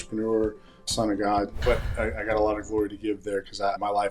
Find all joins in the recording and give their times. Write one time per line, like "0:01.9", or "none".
0:01.6